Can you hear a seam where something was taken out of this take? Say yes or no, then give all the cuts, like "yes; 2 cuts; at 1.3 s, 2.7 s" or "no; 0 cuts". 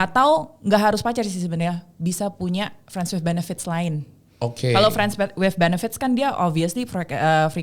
no; 0 cuts